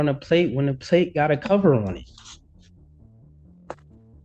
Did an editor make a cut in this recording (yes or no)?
no